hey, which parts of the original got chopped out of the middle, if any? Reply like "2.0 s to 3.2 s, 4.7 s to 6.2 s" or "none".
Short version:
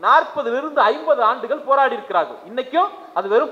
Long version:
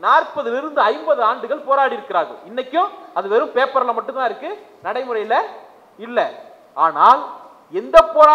none